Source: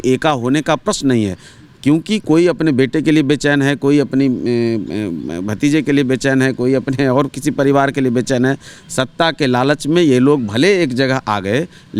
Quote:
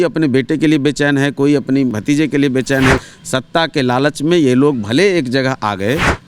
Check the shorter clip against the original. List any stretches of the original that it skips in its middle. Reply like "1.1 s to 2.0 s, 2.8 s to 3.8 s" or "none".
4.4 s to 5.5 s, 6.6 s to 8.7 s